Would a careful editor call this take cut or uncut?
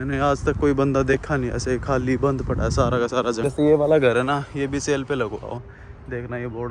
cut